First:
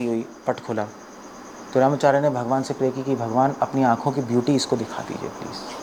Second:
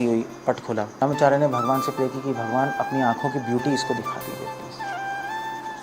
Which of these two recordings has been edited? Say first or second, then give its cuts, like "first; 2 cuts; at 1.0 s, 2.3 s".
second; 1 cut; at 1.0 s